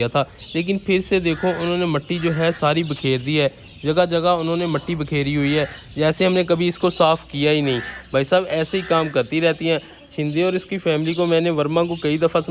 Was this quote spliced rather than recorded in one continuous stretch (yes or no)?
no